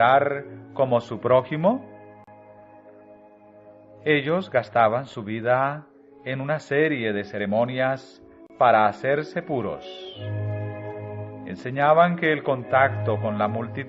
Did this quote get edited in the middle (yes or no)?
yes